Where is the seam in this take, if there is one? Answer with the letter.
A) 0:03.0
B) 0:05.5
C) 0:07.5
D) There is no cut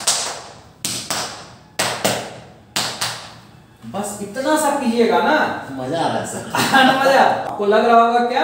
C